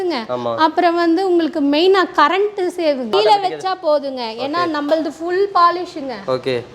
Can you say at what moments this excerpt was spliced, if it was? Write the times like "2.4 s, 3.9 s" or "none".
3.1 s